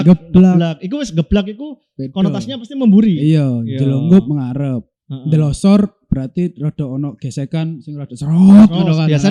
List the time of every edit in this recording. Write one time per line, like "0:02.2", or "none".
none